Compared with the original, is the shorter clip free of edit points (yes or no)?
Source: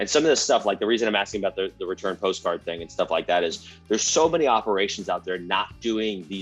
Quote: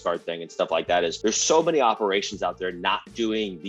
no